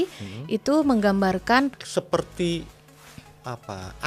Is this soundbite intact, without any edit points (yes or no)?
no